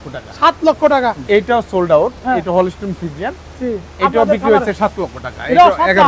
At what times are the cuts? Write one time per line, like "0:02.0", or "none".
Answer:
0:01.2